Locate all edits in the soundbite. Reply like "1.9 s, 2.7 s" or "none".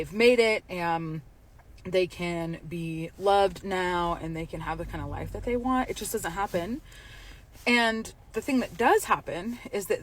1.0 s, 7.9 s